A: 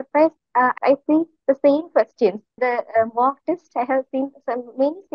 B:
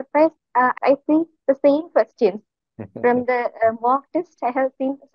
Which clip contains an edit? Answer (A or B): A